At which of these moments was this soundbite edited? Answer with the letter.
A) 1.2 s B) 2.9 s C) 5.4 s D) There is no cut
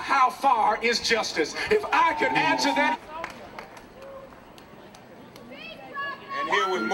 B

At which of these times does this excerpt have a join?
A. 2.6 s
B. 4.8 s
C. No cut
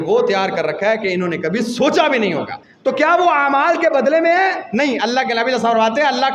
A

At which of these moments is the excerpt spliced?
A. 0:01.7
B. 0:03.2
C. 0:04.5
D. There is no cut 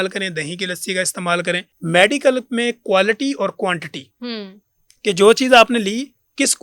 A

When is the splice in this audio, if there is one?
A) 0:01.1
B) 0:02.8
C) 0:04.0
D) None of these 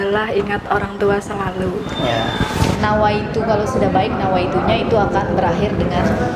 B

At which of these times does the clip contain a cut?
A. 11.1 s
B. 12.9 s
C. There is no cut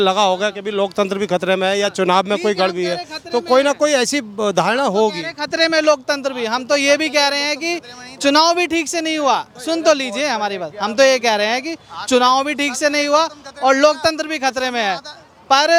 C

